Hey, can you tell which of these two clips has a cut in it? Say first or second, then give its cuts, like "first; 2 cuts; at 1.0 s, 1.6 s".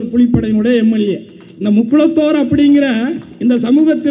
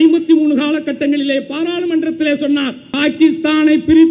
second; 1 cut; at 2.8 s